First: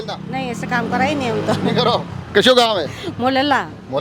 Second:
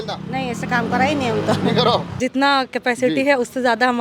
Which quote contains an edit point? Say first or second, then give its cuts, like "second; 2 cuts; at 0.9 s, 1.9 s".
second; 1 cut; at 2.2 s